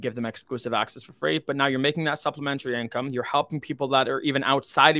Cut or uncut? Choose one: uncut